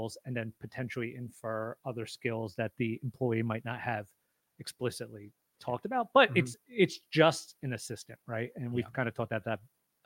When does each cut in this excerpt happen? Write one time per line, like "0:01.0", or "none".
none